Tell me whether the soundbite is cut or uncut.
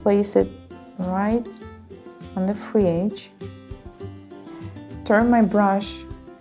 cut